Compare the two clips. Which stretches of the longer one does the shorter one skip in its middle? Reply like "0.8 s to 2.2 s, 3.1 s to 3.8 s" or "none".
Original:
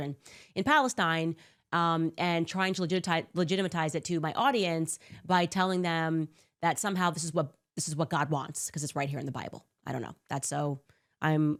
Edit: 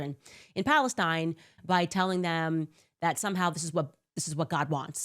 1.5 s to 5.1 s